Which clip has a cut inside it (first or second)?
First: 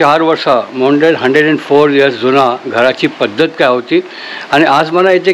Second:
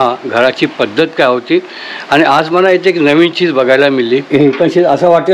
second